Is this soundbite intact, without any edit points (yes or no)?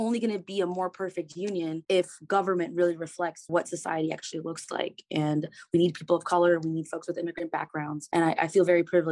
no